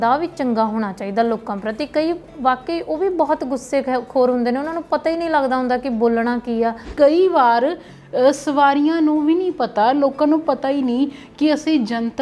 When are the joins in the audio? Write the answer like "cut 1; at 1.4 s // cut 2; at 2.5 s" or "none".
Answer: cut 1; at 6.9 s